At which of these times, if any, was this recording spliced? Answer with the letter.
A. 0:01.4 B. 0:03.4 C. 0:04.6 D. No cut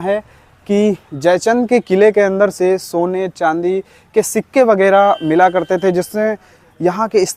D